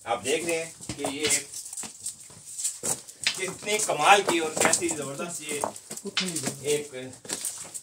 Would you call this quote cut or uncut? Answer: uncut